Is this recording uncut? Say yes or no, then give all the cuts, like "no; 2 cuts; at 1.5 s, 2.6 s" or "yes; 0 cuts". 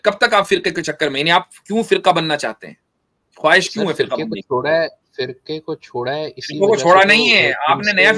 yes; 0 cuts